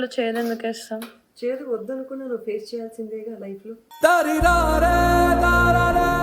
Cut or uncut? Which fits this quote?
uncut